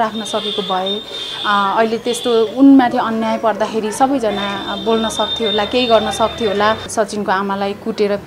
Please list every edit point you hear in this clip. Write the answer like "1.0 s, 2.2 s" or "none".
6.9 s